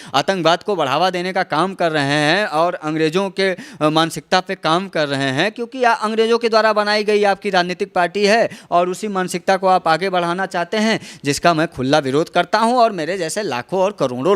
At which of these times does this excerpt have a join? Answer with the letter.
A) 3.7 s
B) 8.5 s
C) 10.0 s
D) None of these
D